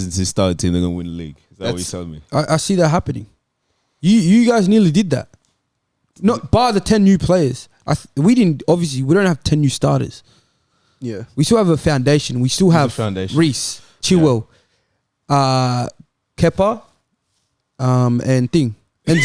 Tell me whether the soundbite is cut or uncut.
uncut